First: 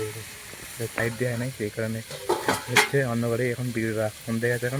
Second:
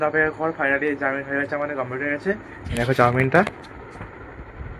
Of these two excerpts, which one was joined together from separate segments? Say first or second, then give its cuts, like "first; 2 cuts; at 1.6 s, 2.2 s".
first; 1 cut; at 1.0 s